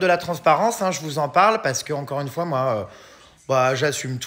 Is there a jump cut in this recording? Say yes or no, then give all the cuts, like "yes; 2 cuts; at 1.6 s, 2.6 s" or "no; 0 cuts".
no; 0 cuts